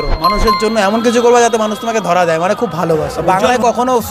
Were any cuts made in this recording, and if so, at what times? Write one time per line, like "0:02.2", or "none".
0:03.1